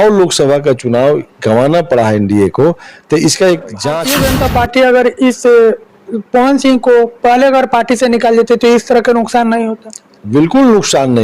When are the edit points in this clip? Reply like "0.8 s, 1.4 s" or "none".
4.0 s